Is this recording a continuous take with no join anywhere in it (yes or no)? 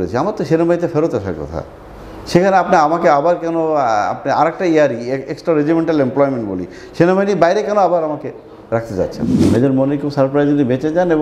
no